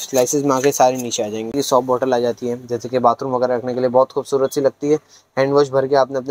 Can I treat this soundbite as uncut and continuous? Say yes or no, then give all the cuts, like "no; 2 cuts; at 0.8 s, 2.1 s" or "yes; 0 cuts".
no; 1 cut; at 1.5 s